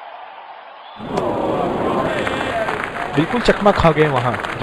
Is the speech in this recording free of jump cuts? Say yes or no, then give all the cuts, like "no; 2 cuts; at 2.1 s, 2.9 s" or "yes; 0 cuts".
no; 1 cut; at 1.0 s